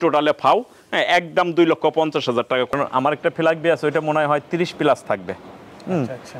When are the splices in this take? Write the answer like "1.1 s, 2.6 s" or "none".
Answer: 2.7 s